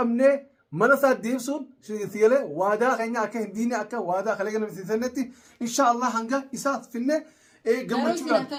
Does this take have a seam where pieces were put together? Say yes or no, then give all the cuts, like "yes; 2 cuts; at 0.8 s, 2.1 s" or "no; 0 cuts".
no; 0 cuts